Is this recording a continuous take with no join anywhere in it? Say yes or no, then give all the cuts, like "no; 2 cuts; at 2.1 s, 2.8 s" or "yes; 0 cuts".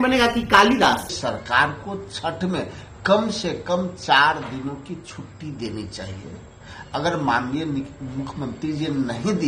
no; 1 cut; at 1.1 s